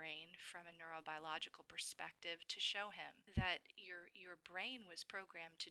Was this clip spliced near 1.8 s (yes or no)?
no